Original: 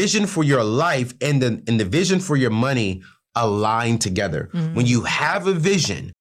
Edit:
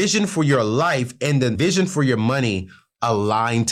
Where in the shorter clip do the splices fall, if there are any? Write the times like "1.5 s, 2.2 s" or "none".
1.6 s